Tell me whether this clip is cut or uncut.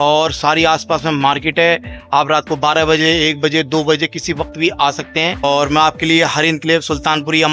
cut